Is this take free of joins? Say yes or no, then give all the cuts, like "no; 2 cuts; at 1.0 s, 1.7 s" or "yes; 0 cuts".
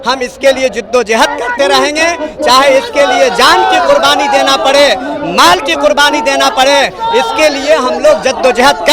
yes; 0 cuts